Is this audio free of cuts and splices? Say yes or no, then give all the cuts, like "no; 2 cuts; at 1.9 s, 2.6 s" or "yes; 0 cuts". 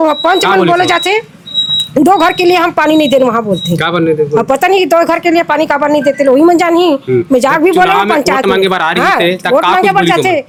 yes; 0 cuts